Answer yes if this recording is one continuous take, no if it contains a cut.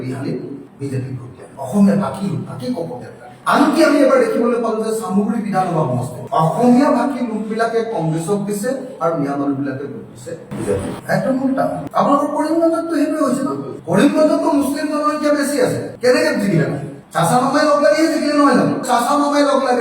yes